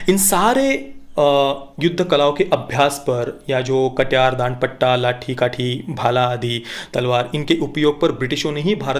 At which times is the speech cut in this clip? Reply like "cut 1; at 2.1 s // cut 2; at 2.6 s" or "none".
none